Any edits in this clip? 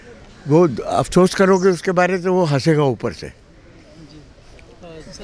no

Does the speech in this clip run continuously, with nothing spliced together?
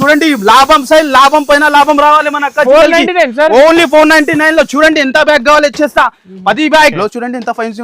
no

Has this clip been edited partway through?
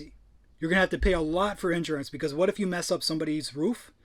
no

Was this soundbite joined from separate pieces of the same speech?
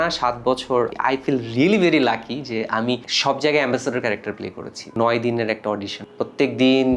yes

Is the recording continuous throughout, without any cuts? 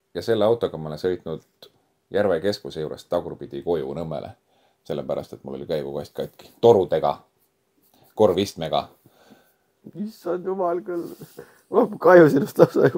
yes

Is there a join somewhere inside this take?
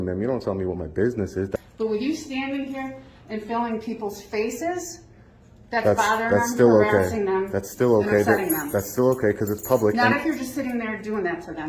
yes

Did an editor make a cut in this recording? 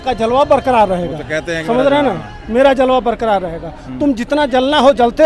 no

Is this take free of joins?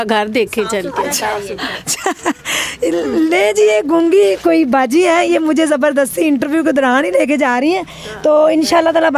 yes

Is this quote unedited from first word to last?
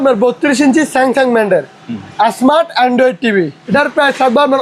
no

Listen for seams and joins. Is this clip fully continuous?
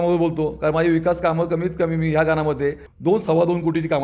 no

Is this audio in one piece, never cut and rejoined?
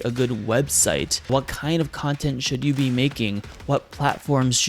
no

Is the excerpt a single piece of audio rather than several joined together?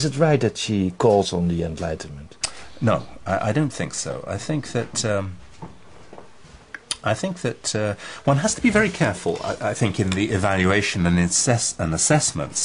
yes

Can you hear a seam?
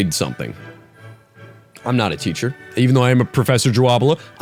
no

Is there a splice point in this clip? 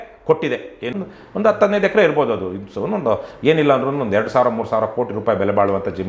yes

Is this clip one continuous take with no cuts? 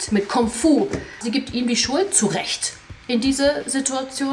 no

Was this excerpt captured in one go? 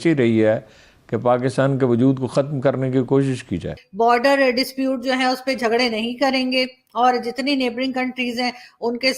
no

